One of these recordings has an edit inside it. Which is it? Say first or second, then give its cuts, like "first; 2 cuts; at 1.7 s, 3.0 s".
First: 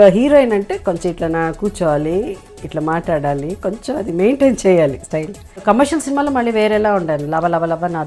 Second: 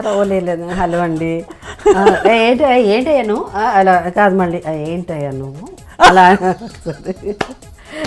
first; 1 cut; at 5.6 s